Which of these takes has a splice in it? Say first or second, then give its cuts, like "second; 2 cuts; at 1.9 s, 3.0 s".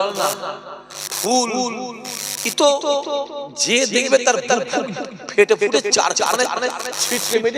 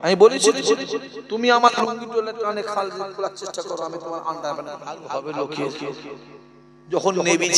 second; 1 cut; at 5.0 s